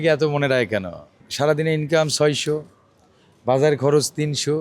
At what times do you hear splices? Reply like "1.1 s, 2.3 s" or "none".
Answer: 1.2 s